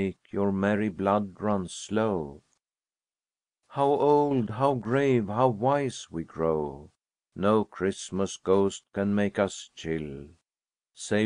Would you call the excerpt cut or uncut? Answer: uncut